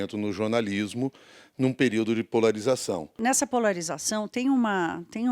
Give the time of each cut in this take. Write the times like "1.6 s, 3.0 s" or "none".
3.2 s